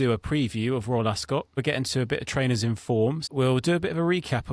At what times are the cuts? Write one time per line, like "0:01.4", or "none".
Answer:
0:01.6
0:03.3

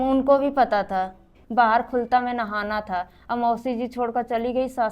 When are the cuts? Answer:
0:01.4

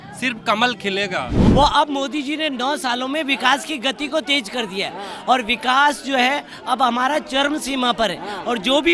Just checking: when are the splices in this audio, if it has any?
0:01.4

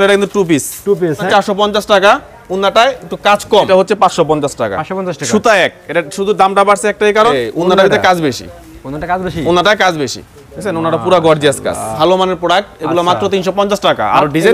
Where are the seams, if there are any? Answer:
0:01.3
0:03.7
0:07.3
0:11.9

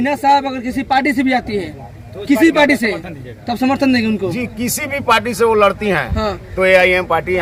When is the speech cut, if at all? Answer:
none

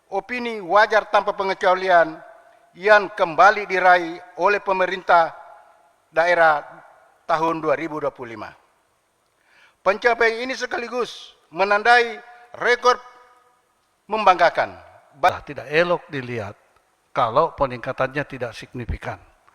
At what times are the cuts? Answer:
0:15.3

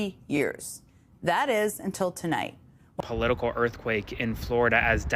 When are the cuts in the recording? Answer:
0:02.9

